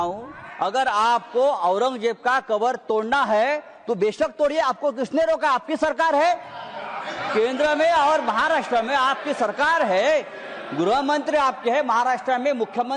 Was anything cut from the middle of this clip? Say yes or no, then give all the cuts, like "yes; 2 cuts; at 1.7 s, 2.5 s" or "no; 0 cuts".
no; 0 cuts